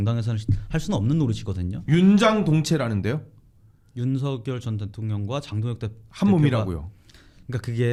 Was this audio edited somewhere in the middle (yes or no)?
no